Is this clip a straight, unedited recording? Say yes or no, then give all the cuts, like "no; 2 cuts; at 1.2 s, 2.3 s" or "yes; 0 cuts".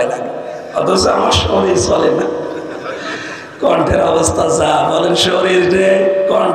yes; 0 cuts